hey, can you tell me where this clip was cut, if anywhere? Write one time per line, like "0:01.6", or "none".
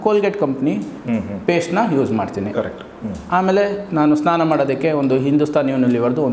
none